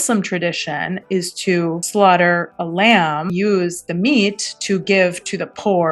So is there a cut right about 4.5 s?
no; 1 cut; at 3.3 s

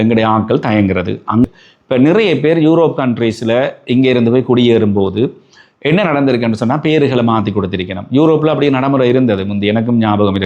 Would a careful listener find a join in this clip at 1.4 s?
yes; 1 cut; at 1.4 s

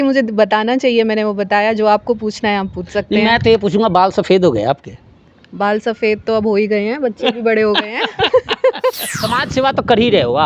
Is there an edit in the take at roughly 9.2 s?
yes; 1 cut; at 9.2 s

